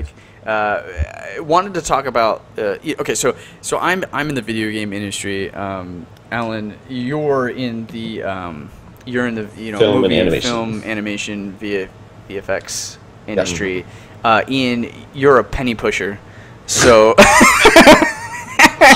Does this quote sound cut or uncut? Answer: cut